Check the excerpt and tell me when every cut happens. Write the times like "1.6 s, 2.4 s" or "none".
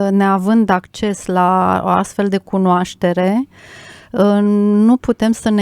none